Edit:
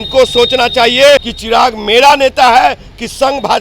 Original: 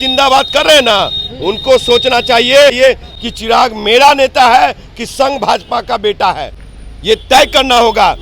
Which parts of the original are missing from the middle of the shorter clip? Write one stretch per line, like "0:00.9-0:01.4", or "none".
0:02.8-0:03.2